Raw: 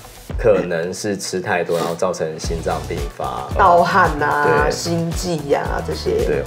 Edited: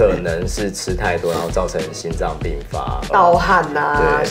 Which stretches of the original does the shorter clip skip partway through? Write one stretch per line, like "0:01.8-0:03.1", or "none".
none